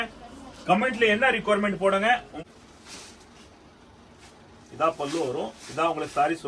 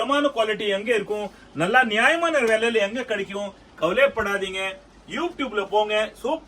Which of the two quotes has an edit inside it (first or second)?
first